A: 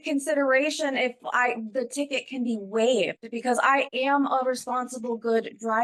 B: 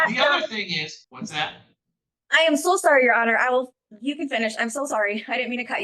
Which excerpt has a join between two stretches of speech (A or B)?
B